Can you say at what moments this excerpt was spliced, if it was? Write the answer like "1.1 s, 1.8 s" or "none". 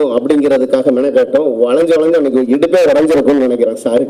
none